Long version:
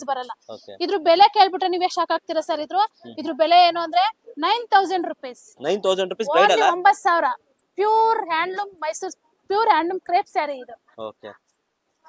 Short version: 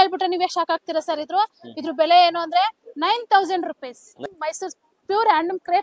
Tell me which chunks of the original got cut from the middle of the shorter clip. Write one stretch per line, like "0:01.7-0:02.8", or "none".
0:05.6-0:08.6